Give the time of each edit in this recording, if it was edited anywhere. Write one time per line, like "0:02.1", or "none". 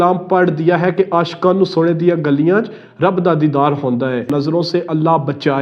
0:04.3

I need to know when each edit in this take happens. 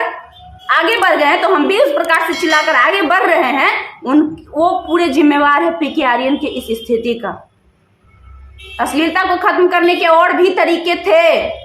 none

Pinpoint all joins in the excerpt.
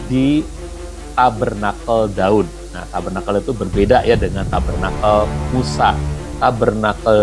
0:06.2

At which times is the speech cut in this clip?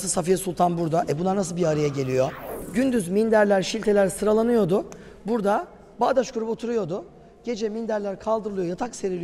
0:02.6

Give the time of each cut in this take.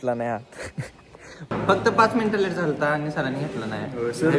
0:01.5

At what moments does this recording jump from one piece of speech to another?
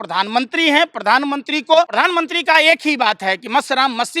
0:01.9

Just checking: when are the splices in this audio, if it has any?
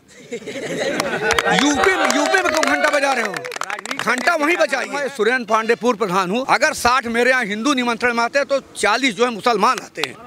0:05.0
0:06.4

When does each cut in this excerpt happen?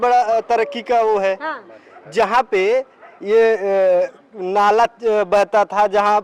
none

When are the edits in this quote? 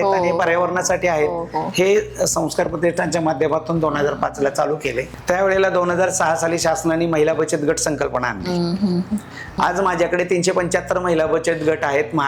0:05.0
0:09.6

